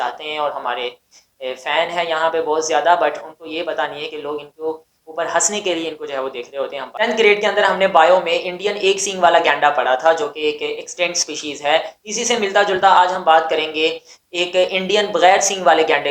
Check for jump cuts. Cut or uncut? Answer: uncut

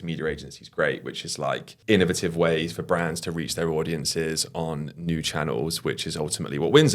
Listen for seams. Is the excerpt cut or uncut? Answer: cut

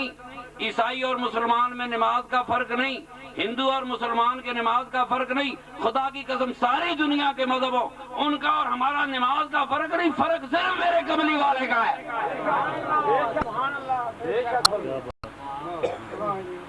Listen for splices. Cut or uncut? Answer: uncut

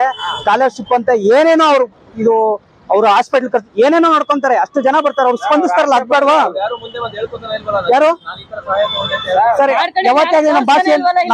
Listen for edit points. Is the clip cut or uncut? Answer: uncut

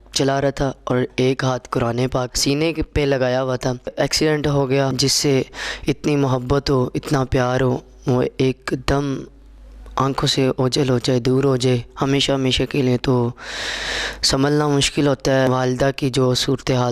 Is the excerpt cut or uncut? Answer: cut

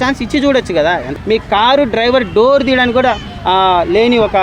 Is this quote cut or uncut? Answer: cut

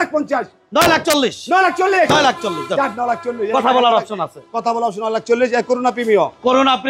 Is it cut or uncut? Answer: uncut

